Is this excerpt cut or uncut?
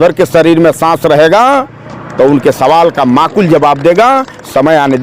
uncut